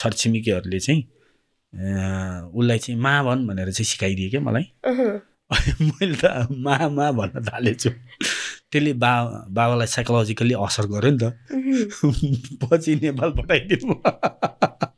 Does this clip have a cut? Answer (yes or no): no